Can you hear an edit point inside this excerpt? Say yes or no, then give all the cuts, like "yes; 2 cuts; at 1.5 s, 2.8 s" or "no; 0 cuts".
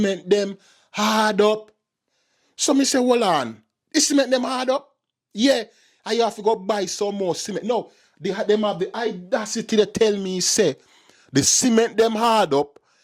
no; 0 cuts